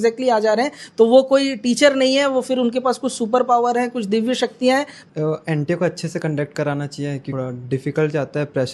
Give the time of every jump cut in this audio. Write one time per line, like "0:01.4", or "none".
0:05.0
0:07.3